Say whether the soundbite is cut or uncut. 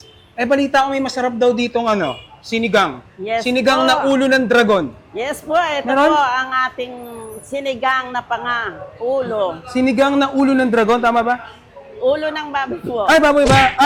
uncut